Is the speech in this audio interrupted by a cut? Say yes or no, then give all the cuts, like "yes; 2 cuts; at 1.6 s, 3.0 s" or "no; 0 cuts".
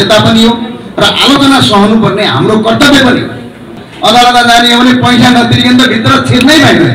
yes; 1 cut; at 3.8 s